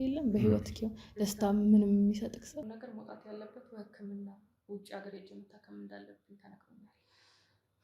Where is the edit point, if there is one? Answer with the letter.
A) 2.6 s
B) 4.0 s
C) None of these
A